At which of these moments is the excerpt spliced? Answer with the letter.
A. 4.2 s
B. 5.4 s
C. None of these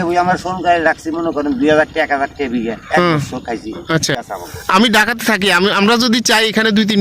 A